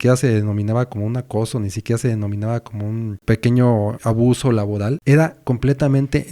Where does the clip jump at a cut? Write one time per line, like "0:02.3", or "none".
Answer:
0:03.2
0:04.0
0:05.0